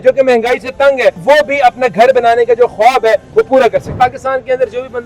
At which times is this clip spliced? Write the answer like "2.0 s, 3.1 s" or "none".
1.2 s, 3.9 s